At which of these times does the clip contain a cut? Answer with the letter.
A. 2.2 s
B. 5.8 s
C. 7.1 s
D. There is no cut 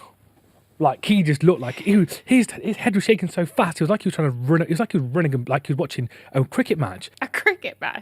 C